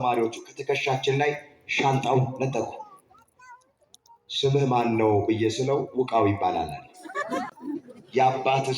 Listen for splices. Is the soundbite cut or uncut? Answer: cut